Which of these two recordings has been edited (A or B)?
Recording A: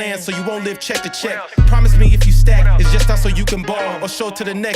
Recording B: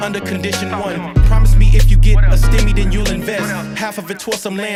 A